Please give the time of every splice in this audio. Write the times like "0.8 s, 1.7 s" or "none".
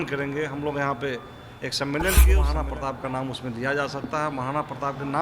2.5 s